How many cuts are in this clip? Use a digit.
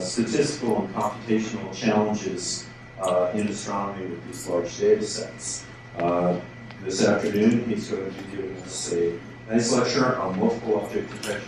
1